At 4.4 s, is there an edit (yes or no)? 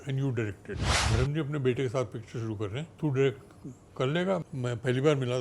yes